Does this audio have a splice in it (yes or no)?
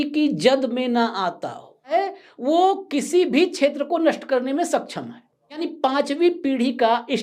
yes